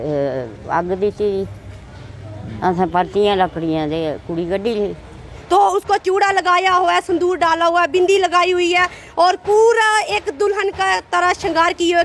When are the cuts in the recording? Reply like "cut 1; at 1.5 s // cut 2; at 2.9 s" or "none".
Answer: cut 1; at 5.3 s